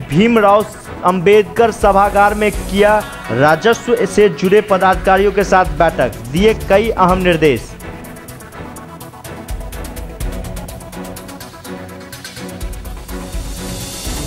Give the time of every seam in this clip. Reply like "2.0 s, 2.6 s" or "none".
none